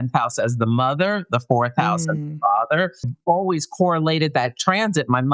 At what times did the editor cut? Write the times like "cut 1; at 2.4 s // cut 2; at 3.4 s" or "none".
cut 1; at 3.1 s